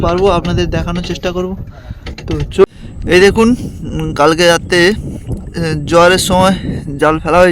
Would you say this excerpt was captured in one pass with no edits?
no; 1 cut; at 2.6 s

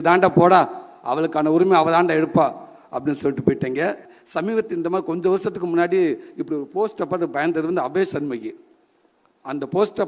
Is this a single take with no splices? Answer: no; 1 cut; at 4.1 s

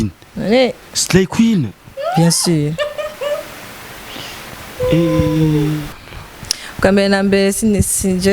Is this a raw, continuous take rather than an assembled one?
no; 1 cut; at 5.8 s

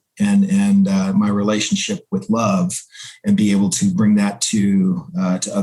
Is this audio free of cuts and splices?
yes; 0 cuts

